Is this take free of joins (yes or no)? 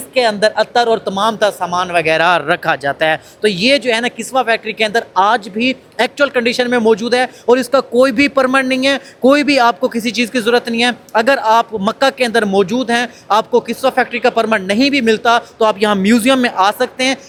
yes